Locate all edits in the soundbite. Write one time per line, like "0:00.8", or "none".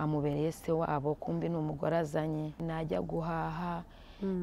0:02.6